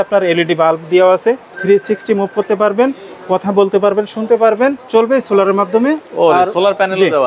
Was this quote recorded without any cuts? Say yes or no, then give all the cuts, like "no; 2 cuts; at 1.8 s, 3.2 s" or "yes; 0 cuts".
no; 2 cuts; at 1.5 s, 4.8 s